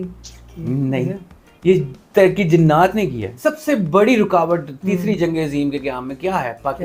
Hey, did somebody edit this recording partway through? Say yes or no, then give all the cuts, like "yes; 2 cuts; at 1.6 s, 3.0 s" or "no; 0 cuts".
yes; 1 cut; at 3.3 s